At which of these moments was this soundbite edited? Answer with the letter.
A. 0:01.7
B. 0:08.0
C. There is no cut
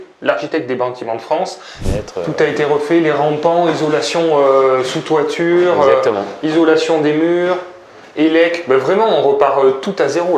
A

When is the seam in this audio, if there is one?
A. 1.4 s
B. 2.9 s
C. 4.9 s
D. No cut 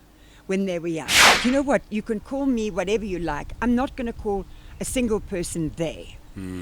A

